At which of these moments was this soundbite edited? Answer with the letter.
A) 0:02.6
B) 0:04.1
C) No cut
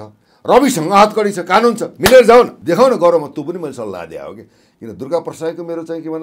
C